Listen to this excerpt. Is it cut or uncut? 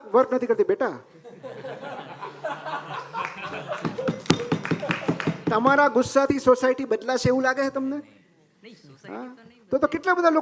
uncut